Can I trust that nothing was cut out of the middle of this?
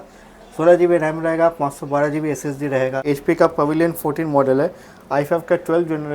no; 1 cut; at 3.0 s

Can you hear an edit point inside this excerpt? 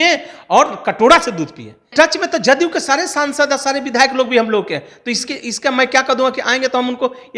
yes; 1 cut; at 1.8 s

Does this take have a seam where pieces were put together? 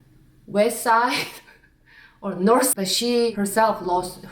yes; 1 cut; at 2.8 s

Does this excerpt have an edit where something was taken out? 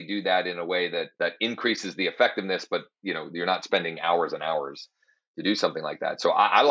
yes; 1 cut; at 1.1 s

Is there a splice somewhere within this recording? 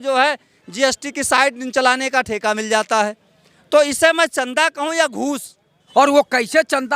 yes; 1 cut; at 5.8 s

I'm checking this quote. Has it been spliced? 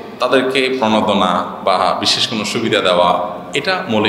no; 0 cuts

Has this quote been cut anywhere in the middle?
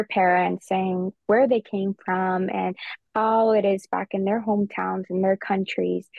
no; 0 cuts

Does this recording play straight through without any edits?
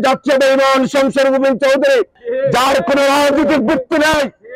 no; 1 cut; at 2.2 s

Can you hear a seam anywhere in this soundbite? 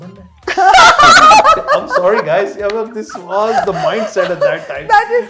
no; 0 cuts

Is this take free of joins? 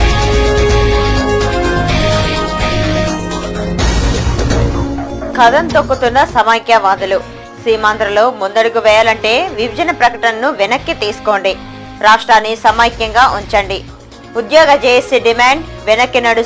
no; 1 cut; at 4.5 s

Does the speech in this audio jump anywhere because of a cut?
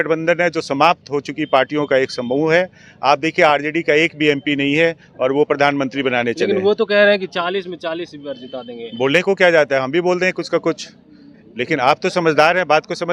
no; 0 cuts

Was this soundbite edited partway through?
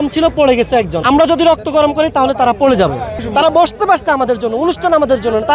yes; 2 cuts; at 1.0 s, 3.2 s

